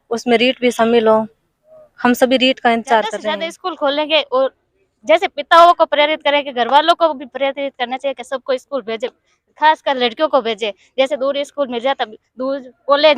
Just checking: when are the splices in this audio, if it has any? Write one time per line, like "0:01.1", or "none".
0:03.3

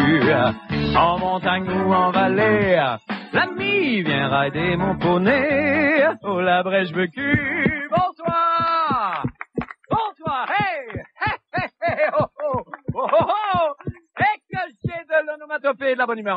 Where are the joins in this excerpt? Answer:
none

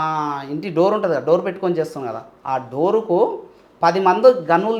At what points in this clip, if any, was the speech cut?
none

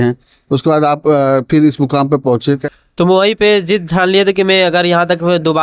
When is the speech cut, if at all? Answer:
0:02.7

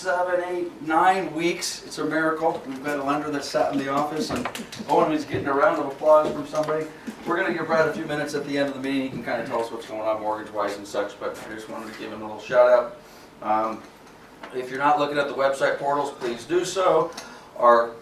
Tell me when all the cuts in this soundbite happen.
none

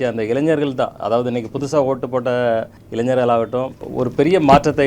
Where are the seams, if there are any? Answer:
0:02.8
0:03.8

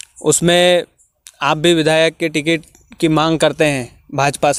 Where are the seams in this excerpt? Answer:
none

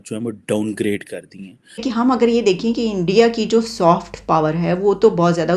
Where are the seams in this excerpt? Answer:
0:01.8

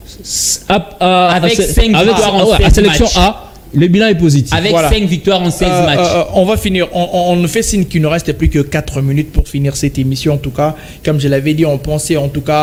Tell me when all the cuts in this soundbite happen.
none

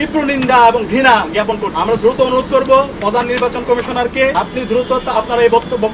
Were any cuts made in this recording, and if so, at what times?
0:01.7
0:04.3

